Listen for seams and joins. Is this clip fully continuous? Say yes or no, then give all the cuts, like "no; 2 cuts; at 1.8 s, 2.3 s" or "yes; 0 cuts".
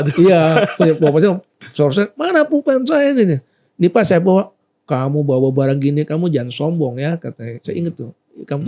yes; 0 cuts